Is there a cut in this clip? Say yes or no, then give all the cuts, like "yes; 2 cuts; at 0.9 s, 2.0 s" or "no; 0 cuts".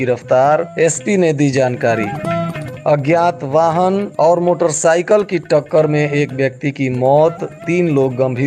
no; 0 cuts